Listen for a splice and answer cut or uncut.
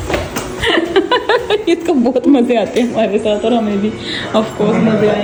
uncut